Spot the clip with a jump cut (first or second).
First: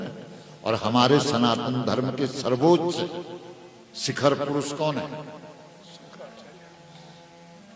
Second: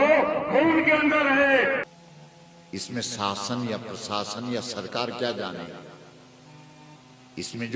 second